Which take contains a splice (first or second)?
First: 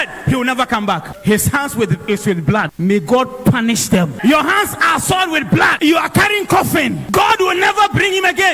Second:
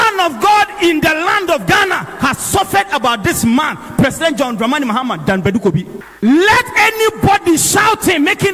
first